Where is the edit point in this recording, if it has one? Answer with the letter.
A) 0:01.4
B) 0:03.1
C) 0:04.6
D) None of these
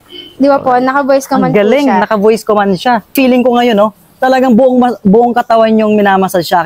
B